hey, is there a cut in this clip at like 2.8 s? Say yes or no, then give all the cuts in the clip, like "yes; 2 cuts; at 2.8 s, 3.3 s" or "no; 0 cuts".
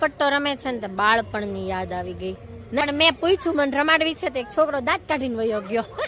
yes; 1 cut; at 2.8 s